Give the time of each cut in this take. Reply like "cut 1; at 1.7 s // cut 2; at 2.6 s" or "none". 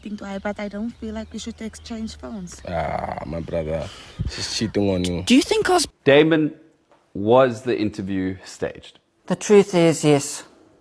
cut 1; at 5.9 s